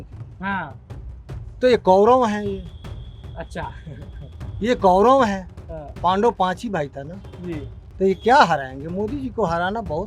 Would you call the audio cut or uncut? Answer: cut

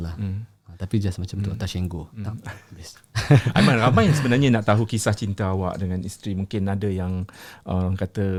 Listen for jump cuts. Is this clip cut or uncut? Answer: uncut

